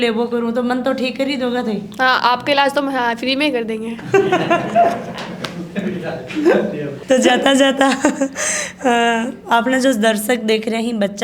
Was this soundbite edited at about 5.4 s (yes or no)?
no